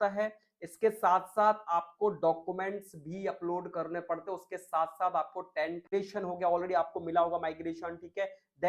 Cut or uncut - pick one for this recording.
cut